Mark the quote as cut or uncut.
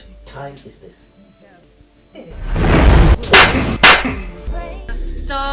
cut